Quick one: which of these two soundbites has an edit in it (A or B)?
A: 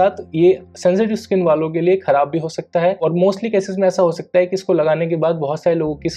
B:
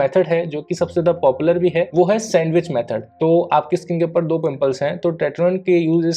B